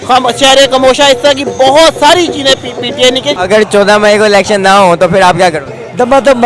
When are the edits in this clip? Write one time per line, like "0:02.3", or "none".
0:03.4